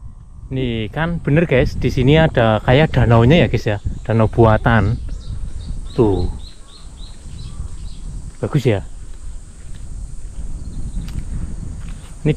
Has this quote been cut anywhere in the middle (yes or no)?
no